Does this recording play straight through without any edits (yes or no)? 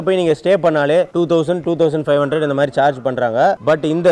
yes